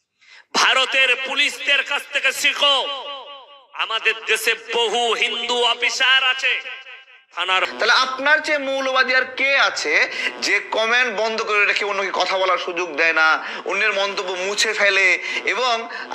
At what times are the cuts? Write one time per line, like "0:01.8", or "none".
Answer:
0:07.7